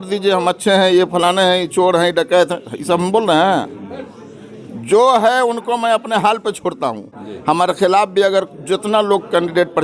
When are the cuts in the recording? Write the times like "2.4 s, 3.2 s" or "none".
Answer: 7.1 s